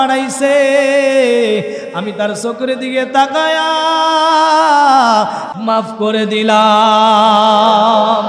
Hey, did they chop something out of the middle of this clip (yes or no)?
yes